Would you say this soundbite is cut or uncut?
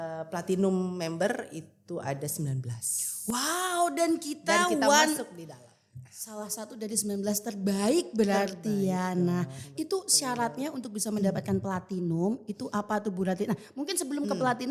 uncut